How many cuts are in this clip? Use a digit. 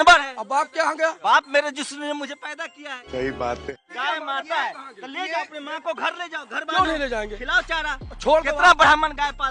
3